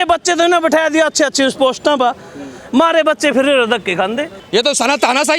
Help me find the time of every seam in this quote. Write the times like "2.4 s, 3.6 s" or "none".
4.4 s